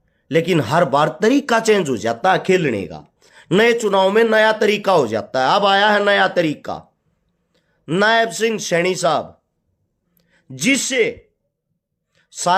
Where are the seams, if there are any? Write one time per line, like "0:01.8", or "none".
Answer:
none

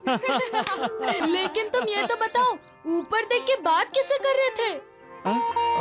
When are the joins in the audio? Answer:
0:01.2

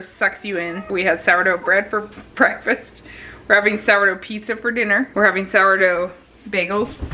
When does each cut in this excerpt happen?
0:00.8
0:05.1

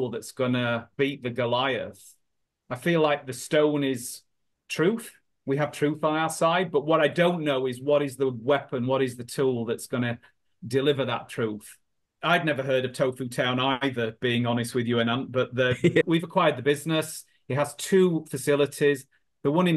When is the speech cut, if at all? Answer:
0:12.2
0:16.1

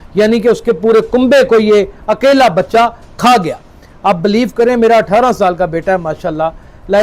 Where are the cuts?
none

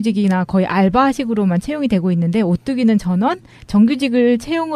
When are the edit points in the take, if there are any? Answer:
0:02.2

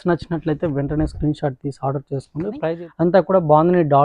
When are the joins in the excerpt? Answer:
0:02.6

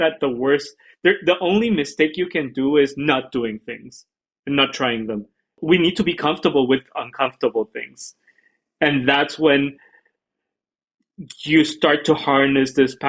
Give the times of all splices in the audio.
0:05.6

